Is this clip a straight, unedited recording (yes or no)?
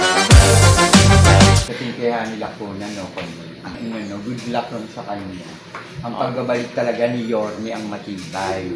no